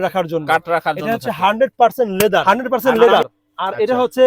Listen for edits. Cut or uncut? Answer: cut